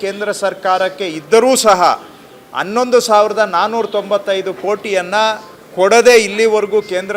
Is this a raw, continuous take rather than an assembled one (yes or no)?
yes